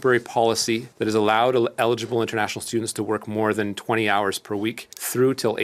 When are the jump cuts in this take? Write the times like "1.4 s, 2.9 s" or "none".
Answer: none